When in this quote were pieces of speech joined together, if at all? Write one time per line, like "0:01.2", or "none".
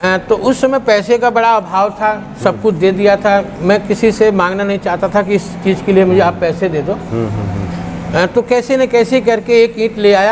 none